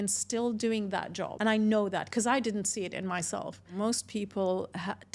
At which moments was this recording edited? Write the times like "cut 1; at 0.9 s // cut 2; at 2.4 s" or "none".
cut 1; at 1.3 s // cut 2; at 3.6 s

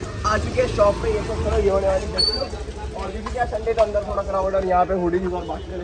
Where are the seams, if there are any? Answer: none

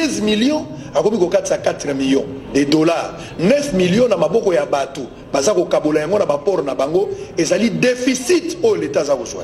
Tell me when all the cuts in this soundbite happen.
none

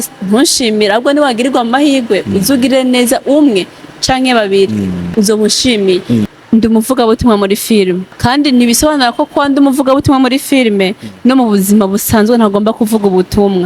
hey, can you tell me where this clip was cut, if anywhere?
cut 1; at 5.1 s // cut 2; at 6.3 s // cut 3; at 8.1 s

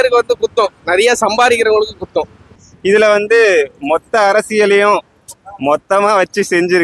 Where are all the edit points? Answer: cut 1; at 2.6 s

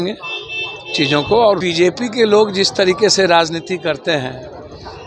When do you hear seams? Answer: cut 1; at 1.6 s

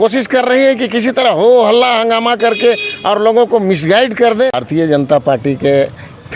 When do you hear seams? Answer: cut 1; at 4.6 s

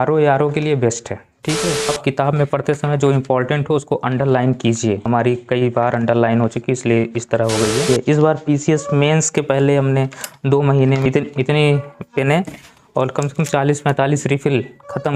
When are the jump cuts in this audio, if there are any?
cut 1; at 1.9 s // cut 2; at 5.0 s // cut 3; at 7.9 s // cut 4; at 11.1 s

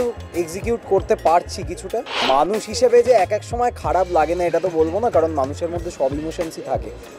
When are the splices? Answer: cut 1; at 2.1 s

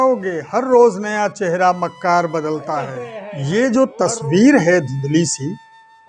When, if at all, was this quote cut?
cut 1; at 3.5 s

